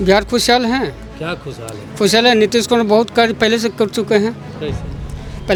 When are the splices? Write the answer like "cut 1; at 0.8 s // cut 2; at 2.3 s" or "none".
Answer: none